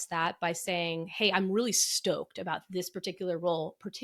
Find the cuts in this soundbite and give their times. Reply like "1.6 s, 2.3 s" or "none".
none